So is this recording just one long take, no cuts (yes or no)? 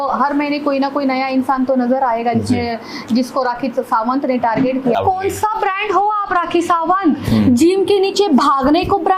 no